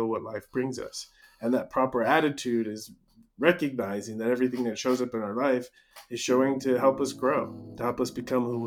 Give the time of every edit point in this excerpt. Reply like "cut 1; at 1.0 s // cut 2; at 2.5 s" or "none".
cut 1; at 7.6 s